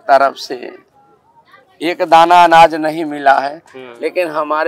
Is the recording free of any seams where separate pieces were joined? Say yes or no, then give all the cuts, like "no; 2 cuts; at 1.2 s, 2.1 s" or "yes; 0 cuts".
yes; 0 cuts